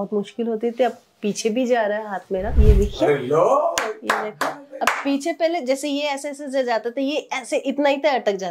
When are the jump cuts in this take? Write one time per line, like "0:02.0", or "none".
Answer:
0:02.5